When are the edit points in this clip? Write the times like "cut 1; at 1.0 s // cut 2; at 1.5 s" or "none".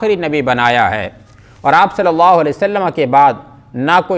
none